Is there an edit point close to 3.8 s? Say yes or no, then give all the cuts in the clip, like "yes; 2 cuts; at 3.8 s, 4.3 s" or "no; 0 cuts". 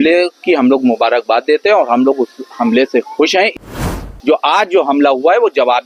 yes; 1 cut; at 3.8 s